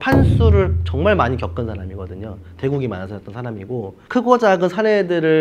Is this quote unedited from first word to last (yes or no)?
yes